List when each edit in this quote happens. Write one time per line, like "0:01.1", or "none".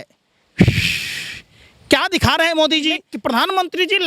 0:03.1